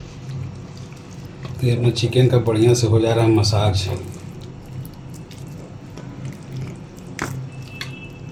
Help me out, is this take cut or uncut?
uncut